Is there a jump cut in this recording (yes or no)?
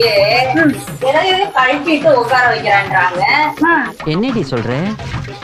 no